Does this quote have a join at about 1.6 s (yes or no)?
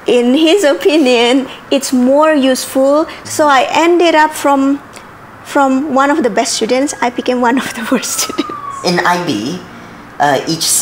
no